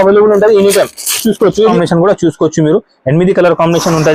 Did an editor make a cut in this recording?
yes; 1 cut; at 1.7 s

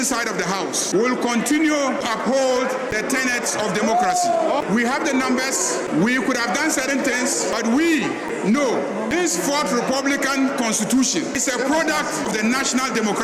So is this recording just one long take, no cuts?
no; 9 cuts; at 0.8 s, 2.0 s, 2.9 s, 4.5 s, 5.9 s, 7.5 s, 9.1 s, 11.4 s, 12.3 s

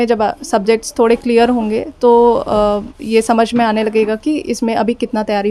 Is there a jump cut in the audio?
no; 0 cuts

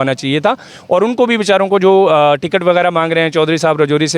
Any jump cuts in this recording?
no; 0 cuts

